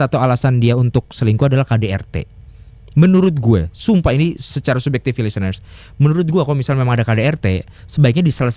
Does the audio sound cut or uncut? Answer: uncut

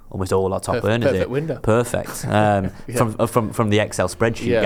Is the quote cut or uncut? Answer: uncut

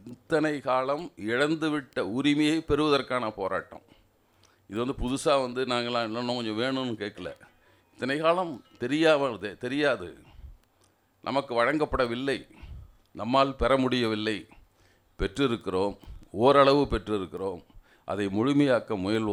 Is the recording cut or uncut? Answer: uncut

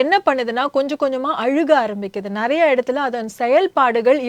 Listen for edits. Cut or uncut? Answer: uncut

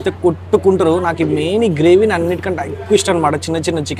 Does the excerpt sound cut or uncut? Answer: uncut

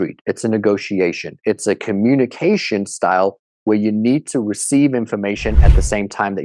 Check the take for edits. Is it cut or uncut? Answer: uncut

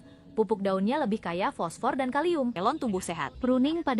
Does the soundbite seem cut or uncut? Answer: cut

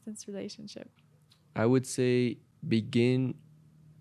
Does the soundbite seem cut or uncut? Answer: cut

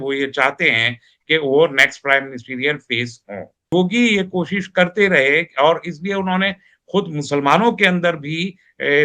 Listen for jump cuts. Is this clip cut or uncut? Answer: cut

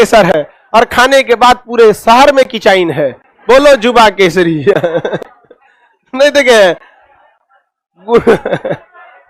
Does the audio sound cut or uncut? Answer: uncut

